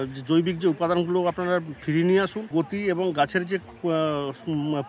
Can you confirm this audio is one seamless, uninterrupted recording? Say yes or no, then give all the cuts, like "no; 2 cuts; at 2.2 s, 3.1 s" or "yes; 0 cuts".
no; 1 cut; at 2.5 s